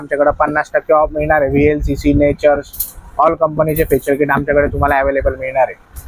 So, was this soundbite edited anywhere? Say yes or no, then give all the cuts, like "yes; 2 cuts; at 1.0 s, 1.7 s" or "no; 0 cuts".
no; 0 cuts